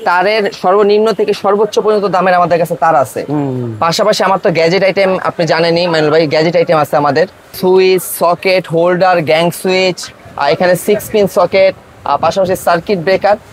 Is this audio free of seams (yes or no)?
no